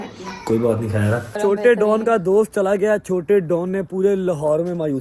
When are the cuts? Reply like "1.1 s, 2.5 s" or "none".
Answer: 1.3 s